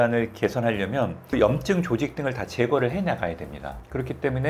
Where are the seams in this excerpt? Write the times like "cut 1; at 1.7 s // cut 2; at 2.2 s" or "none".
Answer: cut 1; at 1.3 s